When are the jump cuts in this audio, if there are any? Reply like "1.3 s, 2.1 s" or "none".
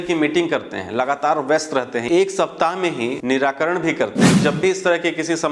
2.0 s, 3.2 s, 4.4 s